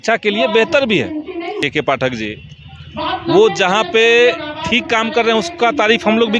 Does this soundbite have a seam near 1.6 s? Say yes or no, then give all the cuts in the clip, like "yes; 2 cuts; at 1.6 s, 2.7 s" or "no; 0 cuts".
yes; 1 cut; at 1.6 s